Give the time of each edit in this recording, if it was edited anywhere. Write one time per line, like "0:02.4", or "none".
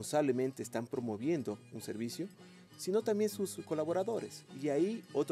none